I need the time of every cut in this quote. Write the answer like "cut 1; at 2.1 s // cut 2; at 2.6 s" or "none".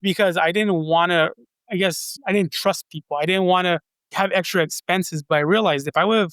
cut 1; at 2.1 s // cut 2; at 4.1 s